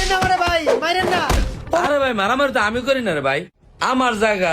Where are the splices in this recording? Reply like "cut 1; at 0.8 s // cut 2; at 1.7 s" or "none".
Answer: cut 1; at 1.8 s